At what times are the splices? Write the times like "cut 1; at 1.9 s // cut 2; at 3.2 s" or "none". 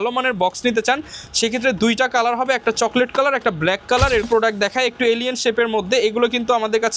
cut 1; at 4.3 s